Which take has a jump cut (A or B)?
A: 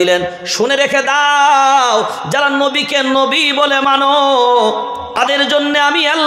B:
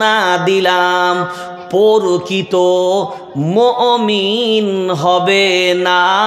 A